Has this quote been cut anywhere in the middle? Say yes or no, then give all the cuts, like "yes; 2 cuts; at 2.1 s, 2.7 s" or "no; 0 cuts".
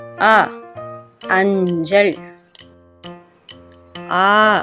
no; 0 cuts